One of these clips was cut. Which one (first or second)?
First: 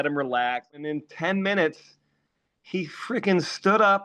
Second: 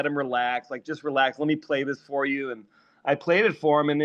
first